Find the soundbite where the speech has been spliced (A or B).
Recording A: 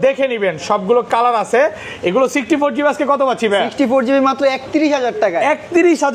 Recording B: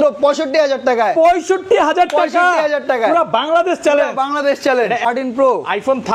B